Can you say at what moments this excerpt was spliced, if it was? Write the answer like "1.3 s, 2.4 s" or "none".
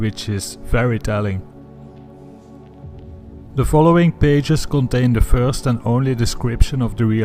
none